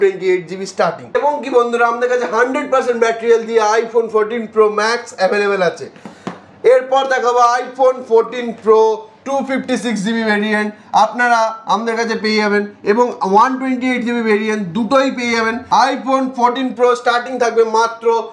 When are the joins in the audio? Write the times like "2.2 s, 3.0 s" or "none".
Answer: none